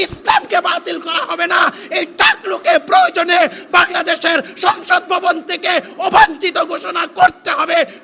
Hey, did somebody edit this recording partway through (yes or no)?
no